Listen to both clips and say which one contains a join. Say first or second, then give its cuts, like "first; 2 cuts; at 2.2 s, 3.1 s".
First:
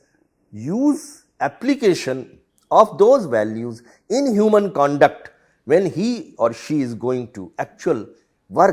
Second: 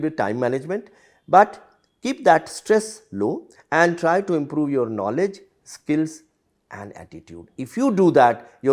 second; 1 cut; at 3.5 s